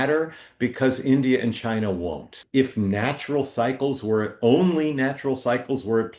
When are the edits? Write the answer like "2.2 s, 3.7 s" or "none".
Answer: 2.4 s

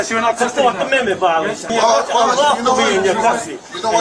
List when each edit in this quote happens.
1.7 s

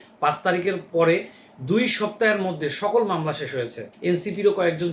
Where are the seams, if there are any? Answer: 3.9 s

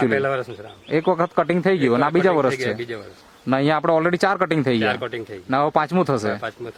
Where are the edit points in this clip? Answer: none

